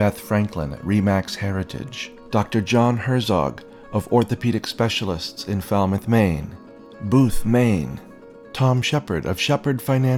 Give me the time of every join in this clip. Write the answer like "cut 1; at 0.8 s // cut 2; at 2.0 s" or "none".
none